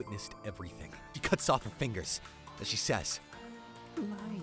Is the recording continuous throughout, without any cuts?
no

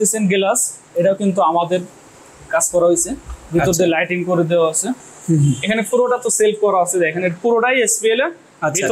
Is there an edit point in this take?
no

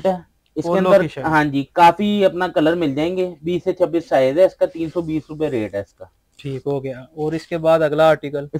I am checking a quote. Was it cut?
no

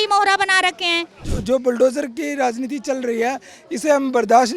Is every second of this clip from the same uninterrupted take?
no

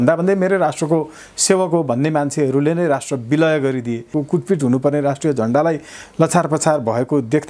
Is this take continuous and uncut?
no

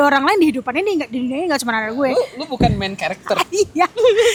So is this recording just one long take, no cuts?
yes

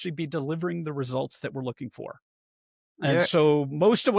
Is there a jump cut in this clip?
no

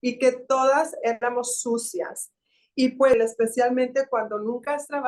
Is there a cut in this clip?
yes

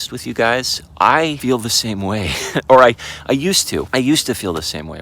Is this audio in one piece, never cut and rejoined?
no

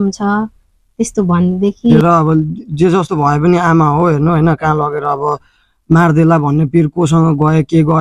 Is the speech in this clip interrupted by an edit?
yes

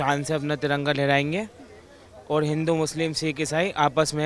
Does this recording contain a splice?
no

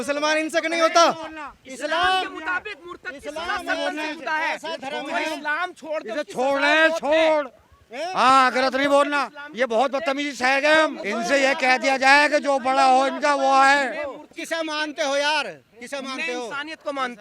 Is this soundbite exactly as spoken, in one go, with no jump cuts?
no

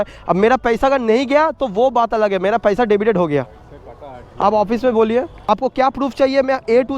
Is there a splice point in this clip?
yes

